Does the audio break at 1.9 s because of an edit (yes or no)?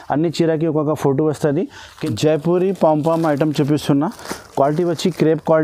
yes